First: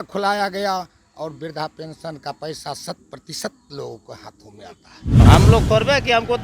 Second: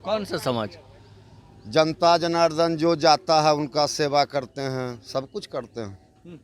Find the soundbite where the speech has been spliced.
first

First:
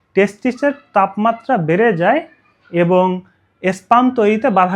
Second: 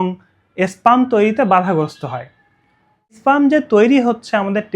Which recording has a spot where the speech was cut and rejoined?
second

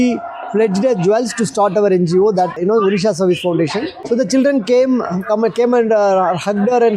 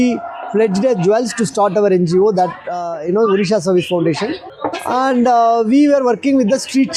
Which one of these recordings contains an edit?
first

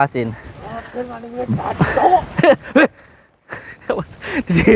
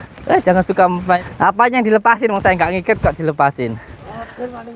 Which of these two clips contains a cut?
second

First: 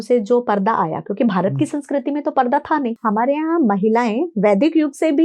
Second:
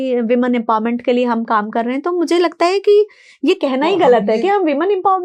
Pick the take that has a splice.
first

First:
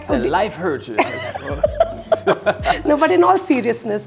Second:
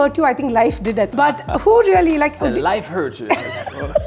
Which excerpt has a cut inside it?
second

